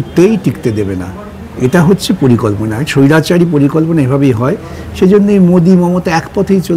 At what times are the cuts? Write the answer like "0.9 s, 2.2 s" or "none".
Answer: none